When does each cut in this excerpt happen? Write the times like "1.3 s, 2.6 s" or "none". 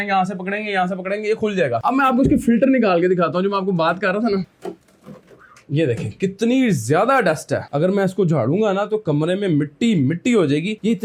none